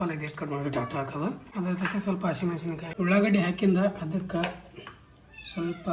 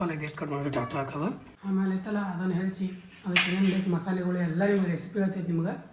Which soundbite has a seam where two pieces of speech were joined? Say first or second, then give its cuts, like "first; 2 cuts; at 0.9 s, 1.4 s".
second; 1 cut; at 1.4 s